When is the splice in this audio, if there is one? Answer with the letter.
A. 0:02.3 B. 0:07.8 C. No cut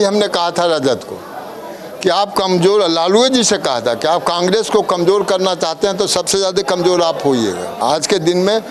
B